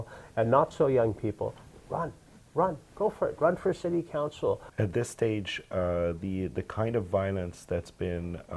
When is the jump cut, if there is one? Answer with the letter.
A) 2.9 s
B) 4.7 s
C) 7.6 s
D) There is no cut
B